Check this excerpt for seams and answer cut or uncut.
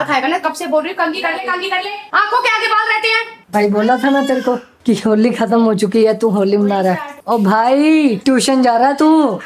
uncut